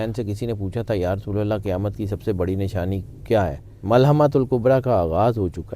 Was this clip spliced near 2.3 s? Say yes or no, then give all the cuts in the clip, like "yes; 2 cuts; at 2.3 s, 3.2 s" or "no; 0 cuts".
no; 1 cut; at 3.7 s